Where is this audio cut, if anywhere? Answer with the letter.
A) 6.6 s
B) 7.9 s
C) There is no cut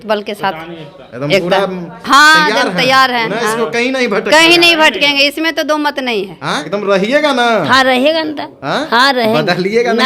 A